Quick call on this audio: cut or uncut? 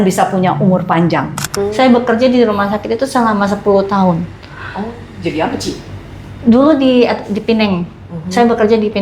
cut